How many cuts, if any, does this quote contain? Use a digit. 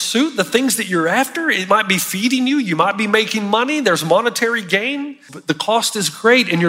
1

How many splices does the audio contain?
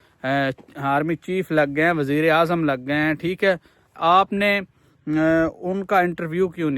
1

